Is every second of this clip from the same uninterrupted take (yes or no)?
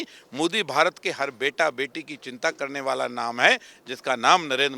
yes